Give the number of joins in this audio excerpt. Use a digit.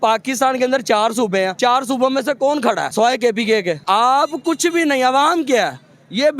3